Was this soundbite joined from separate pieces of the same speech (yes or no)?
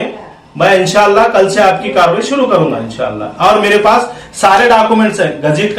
no